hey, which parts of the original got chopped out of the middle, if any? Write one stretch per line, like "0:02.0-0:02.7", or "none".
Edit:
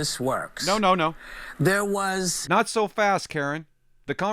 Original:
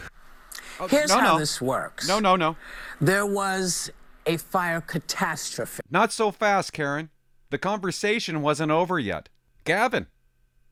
0:03.8-0:05.8

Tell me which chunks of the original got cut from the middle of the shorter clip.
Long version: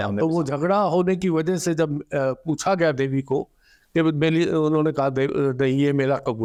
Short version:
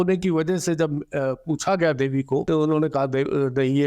0:03.5-0:04.5

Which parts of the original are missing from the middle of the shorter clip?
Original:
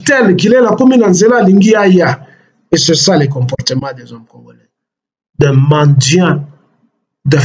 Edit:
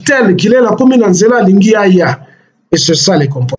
none

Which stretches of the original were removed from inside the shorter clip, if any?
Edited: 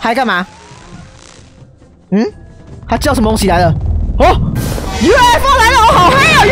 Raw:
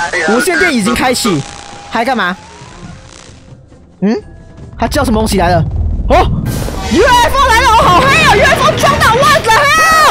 none

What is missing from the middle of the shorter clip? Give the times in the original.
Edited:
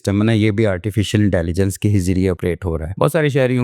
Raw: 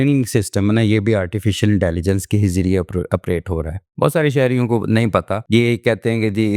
0:03.1-0:03.6

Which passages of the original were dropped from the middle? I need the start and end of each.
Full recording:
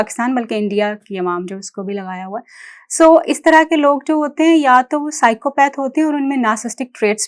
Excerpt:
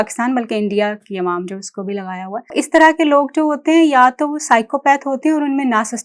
0:02.5-0:03.2

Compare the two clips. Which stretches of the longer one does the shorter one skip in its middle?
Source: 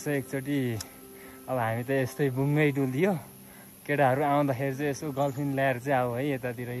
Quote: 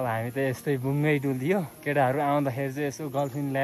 0:03.3-0:03.8

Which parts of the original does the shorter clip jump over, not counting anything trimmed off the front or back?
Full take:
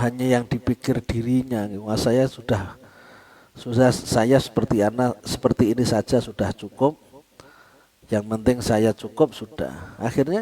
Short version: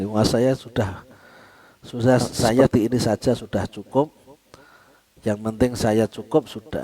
0:04.4-0:05.5

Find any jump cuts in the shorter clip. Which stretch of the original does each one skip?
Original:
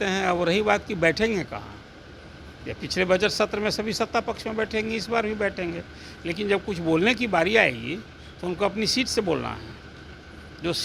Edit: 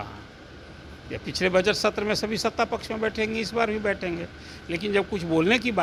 none

